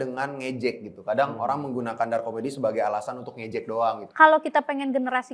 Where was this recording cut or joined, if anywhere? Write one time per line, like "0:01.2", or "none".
0:04.0

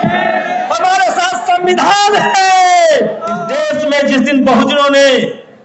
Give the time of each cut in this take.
0:03.5

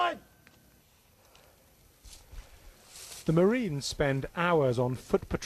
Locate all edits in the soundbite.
0:02.9

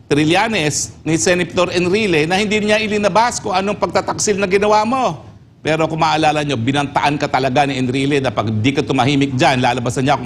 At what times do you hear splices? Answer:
none

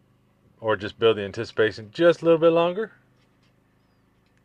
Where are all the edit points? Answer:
none

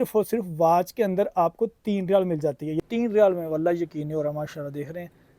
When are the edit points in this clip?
0:02.8

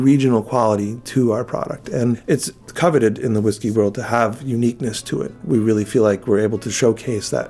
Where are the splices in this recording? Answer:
0:02.4
0:05.4

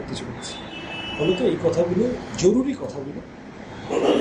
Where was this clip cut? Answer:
none

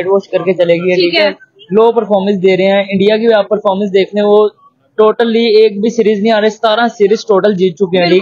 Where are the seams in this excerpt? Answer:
none

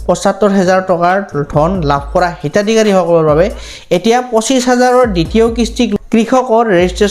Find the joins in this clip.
0:05.9

